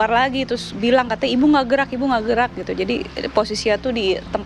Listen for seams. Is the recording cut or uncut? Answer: uncut